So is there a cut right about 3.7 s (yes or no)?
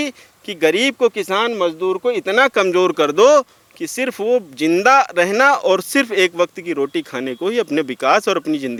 no